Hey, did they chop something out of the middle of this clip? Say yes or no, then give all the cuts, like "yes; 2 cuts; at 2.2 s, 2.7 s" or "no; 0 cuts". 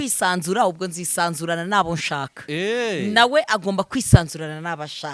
no; 0 cuts